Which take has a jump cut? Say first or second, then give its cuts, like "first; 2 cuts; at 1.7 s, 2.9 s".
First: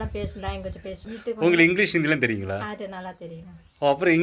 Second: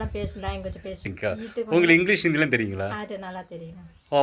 first; 1 cut; at 1.1 s